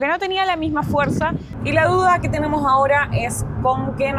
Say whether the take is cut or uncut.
cut